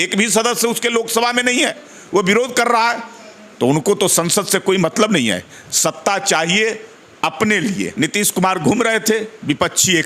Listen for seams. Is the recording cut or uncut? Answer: cut